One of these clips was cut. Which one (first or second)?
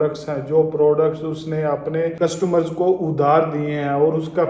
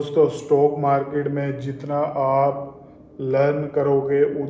first